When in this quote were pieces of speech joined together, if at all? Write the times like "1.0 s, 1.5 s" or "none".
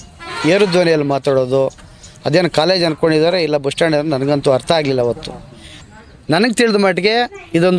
5.7 s